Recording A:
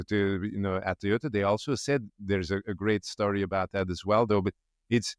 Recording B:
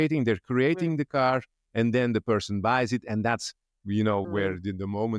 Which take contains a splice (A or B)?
B